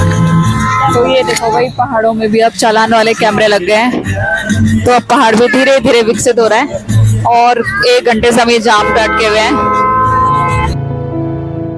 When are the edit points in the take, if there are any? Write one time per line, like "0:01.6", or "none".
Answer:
none